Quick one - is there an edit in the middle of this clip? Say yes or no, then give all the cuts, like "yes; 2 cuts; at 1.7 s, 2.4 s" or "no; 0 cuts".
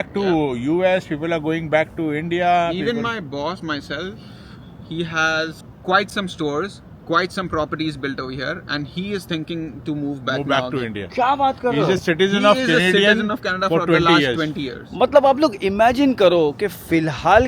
no; 0 cuts